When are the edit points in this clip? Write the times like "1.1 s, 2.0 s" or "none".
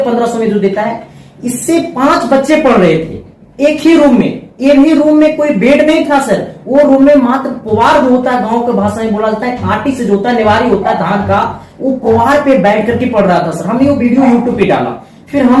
none